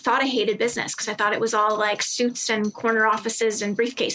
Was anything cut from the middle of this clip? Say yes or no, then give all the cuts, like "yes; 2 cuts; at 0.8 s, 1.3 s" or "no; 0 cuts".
no; 0 cuts